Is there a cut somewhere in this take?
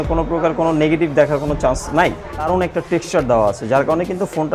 yes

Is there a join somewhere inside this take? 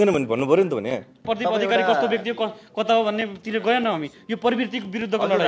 yes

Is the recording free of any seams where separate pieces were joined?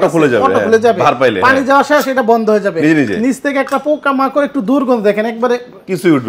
yes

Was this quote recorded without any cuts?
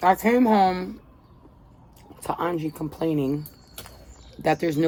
yes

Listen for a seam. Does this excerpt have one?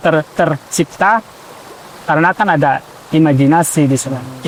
no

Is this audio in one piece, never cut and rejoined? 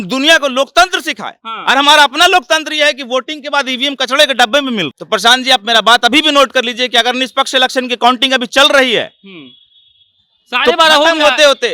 no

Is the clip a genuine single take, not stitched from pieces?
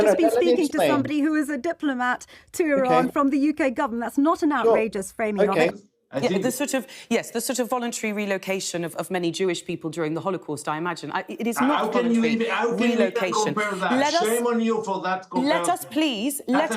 no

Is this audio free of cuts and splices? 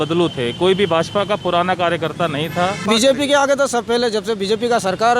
no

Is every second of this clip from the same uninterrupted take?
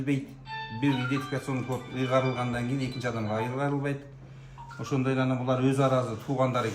yes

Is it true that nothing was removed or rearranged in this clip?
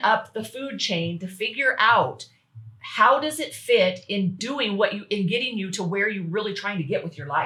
yes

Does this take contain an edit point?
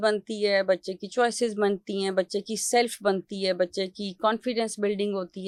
no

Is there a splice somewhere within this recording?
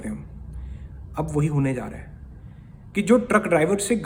no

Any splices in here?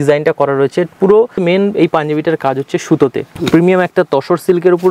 yes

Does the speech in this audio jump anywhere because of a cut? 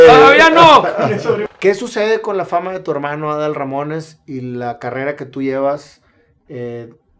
yes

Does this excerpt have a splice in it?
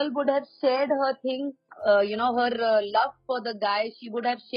yes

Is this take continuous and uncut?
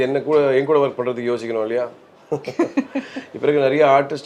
yes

